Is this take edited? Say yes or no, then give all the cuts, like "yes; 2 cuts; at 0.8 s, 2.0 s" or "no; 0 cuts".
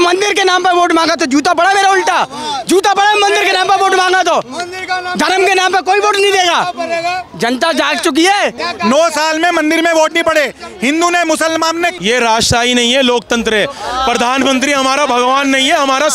yes; 2 cuts; at 8.6 s, 12.0 s